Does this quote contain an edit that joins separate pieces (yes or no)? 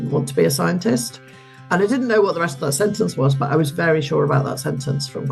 no